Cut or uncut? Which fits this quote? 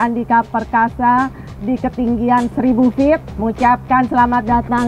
cut